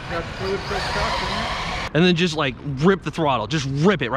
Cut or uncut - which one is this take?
cut